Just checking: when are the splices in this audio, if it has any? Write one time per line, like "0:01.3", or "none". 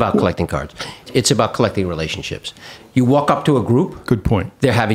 0:01.1
0:02.8